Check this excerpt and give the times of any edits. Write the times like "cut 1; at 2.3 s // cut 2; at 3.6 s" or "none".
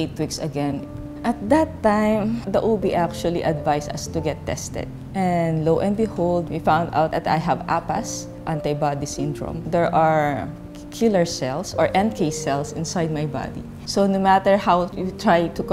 cut 1; at 0.9 s // cut 2; at 9.6 s // cut 3; at 13.7 s